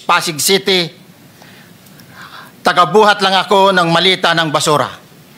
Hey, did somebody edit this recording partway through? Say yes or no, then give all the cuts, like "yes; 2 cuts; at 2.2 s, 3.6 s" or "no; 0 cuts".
no; 0 cuts